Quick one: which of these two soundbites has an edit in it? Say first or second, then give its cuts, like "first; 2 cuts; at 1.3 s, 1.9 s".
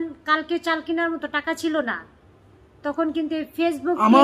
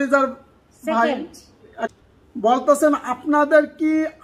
second; 1 cut; at 1.9 s